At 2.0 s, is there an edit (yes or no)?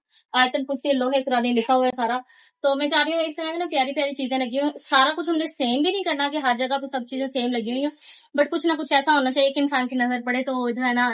no